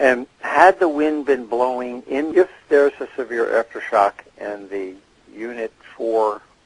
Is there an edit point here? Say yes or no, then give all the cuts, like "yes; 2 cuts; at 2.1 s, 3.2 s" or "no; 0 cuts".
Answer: no; 0 cuts